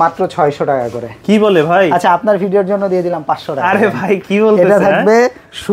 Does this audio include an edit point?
no; 0 cuts

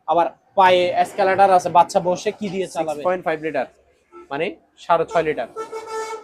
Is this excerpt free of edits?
no; 1 cut; at 2.8 s

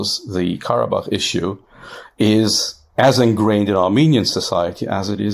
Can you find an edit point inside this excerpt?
no; 0 cuts

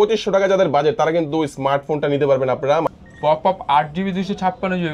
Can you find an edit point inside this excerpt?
yes; 1 cut; at 2.9 s

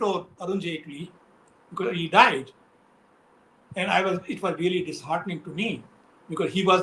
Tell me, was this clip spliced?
no; 0 cuts

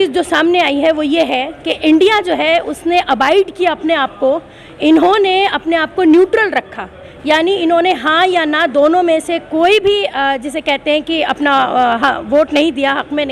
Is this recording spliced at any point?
no; 0 cuts

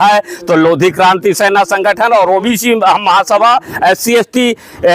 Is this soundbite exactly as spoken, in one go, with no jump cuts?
no; 1 cut; at 2.5 s

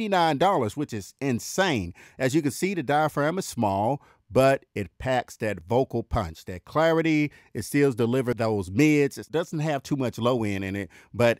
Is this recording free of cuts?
no; 2 cuts; at 8.4 s, 9.2 s

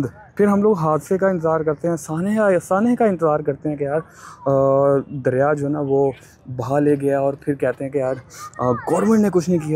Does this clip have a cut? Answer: no; 0 cuts

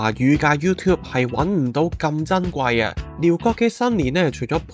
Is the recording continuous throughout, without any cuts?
yes; 0 cuts

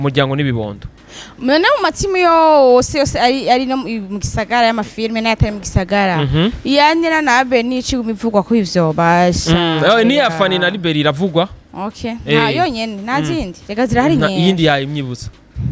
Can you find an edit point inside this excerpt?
no; 0 cuts

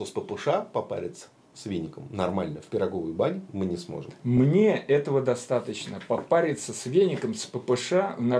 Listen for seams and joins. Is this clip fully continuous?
yes; 0 cuts

